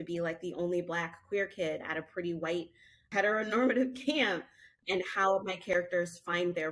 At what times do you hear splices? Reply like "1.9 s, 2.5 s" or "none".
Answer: 3.1 s, 4.8 s

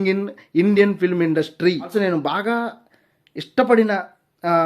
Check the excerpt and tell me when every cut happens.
1.9 s

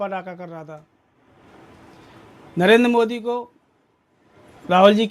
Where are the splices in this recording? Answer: none

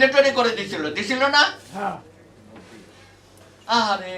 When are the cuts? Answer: none

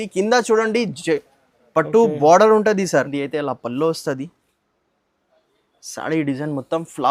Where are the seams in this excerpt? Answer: 3.2 s

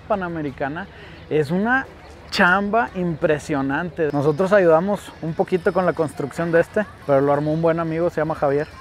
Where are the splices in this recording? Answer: 4.1 s, 6.9 s

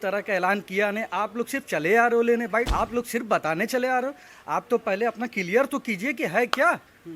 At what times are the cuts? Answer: 2.7 s

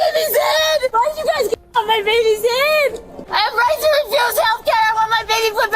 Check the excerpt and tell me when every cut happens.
0.9 s, 3.2 s

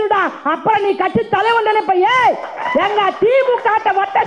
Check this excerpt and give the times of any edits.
none

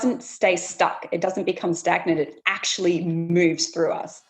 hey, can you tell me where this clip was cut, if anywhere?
3.2 s

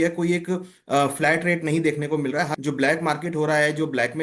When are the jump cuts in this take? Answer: 2.6 s

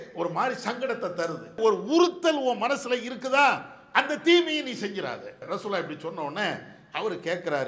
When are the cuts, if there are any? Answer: 1.5 s, 5.4 s

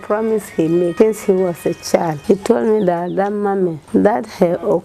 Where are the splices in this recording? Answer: 0.9 s, 2.2 s, 3.8 s

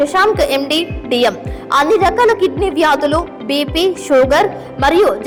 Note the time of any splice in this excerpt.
none

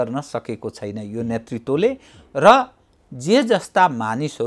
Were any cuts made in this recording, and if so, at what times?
none

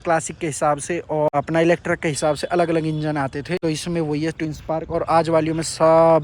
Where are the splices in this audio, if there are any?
1.3 s, 3.6 s

